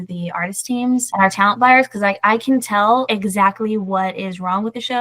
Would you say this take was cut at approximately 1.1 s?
yes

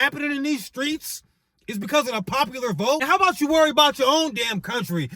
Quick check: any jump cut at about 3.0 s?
yes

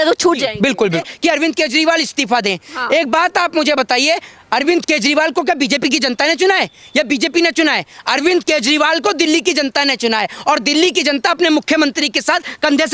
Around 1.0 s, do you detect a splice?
yes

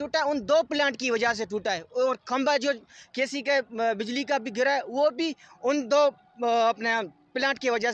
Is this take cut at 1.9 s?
no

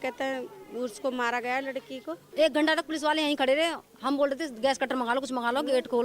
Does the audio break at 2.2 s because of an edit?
yes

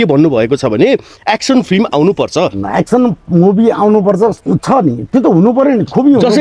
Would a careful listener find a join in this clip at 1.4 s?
no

